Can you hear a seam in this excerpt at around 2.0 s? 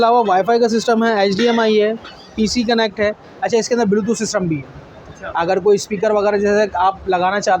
no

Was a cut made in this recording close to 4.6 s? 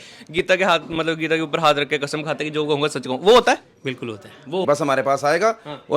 yes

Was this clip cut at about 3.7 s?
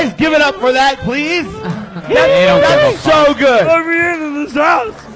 yes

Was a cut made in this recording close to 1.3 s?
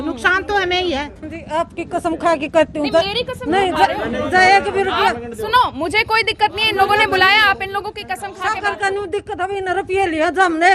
yes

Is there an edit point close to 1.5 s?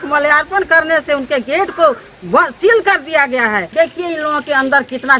no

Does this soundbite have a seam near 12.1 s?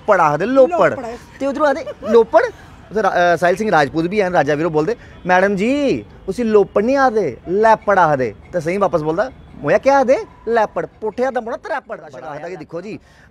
yes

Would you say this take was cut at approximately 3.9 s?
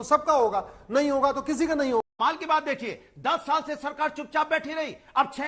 no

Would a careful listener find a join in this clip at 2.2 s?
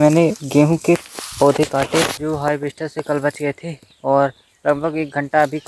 yes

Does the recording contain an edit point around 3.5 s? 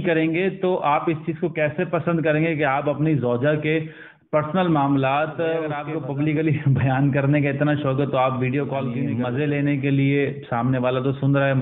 no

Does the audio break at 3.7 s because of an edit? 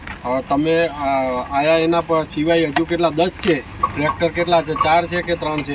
yes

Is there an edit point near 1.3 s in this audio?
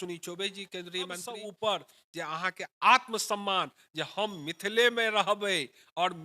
yes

